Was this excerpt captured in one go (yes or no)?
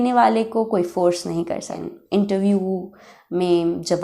no